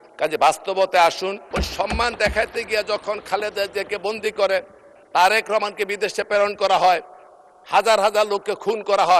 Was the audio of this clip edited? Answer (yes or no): yes